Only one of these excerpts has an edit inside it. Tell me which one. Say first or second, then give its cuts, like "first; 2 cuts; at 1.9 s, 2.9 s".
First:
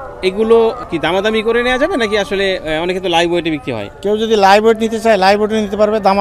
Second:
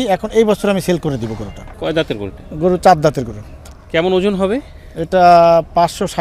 second; 2 cuts; at 1.7 s, 3.7 s